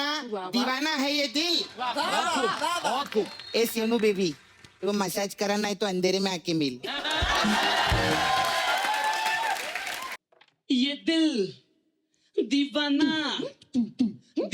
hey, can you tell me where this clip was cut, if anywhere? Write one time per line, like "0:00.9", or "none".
0:10.2